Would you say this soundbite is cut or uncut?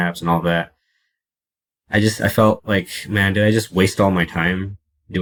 uncut